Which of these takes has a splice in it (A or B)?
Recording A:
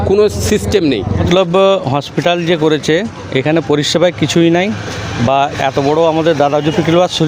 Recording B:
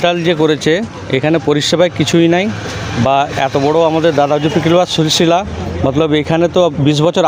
A